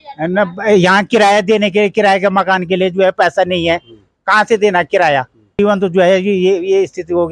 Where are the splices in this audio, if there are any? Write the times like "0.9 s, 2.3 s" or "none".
5.5 s